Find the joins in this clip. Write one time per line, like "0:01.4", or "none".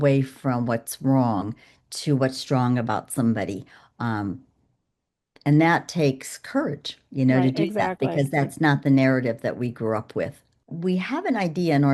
0:10.6